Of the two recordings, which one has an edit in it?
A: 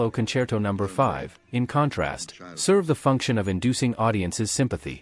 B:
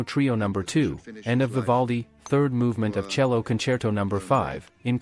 B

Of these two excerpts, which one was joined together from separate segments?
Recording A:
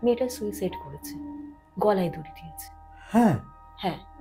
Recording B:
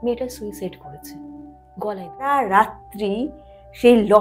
B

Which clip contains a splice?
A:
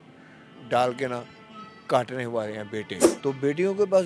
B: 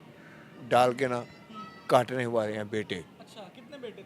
A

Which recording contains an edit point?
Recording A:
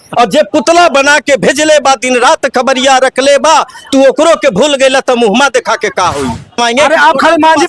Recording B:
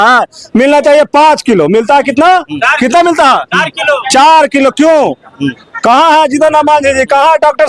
A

